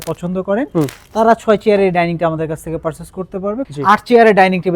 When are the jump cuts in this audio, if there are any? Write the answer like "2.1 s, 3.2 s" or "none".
3.7 s

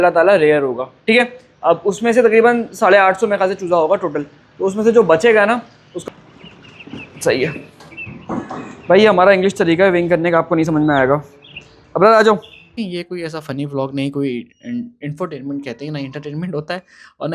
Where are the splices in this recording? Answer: 5.8 s, 12.7 s

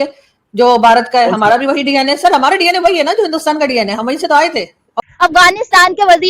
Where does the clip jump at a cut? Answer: 5.1 s

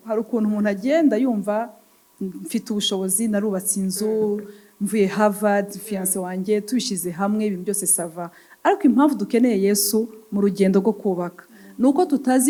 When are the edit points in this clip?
none

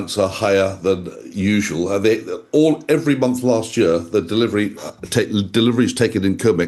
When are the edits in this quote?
none

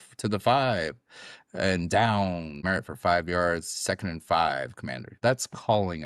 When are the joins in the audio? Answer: 2.6 s, 5.1 s

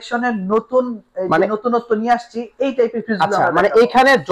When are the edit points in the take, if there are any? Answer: none

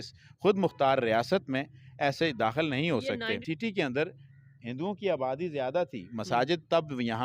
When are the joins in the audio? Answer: 3.4 s

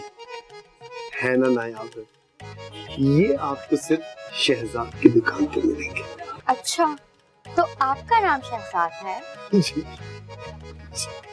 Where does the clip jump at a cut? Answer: none

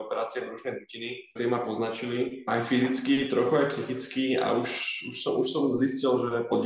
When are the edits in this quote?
none

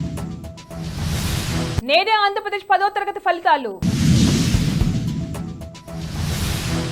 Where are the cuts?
1.7 s

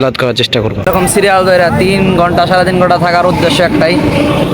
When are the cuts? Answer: 1.0 s

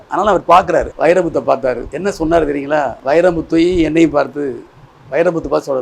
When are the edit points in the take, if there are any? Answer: 0.9 s, 1.9 s, 3.0 s

